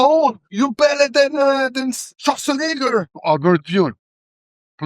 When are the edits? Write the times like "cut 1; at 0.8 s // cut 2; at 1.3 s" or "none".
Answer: cut 1; at 3.1 s

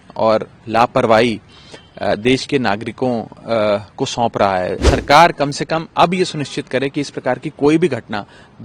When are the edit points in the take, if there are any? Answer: cut 1; at 4.8 s

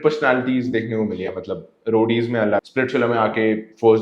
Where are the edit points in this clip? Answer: cut 1; at 2.6 s

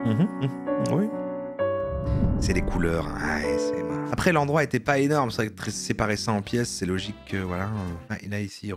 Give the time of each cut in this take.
cut 1; at 4.1 s

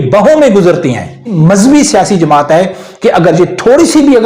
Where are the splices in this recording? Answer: cut 1; at 1.4 s

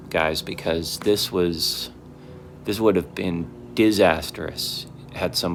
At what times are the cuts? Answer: none

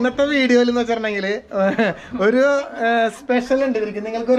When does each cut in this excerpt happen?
none

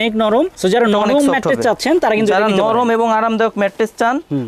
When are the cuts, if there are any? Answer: none

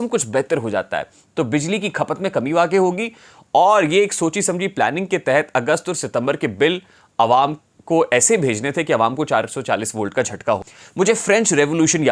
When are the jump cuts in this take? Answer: cut 1; at 10.8 s

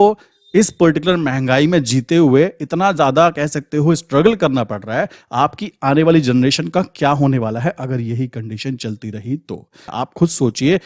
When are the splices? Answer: cut 1; at 9.9 s

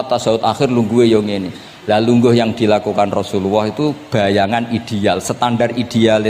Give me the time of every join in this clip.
none

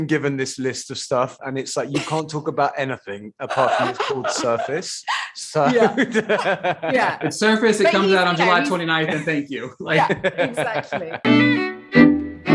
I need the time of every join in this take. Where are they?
cut 1; at 11.1 s

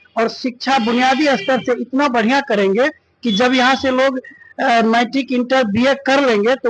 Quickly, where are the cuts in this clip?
none

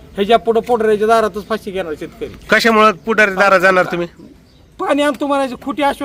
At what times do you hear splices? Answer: none

